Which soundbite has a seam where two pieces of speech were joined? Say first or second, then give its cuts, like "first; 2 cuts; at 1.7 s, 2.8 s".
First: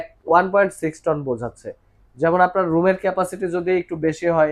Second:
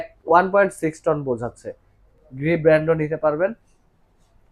second; 1 cut; at 2.0 s